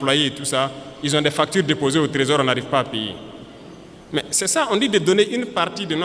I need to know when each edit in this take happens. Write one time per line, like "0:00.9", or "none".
none